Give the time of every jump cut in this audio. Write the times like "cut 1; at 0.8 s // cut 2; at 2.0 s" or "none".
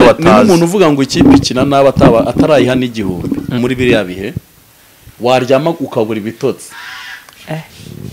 cut 1; at 3.6 s